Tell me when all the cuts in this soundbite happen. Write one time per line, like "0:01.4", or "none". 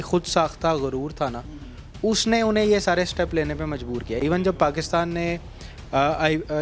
none